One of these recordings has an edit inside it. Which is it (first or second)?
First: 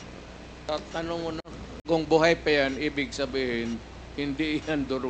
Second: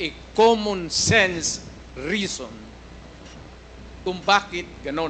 first